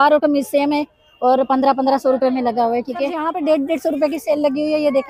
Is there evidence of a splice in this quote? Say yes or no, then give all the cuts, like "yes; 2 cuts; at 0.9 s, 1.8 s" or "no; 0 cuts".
yes; 1 cut; at 3.2 s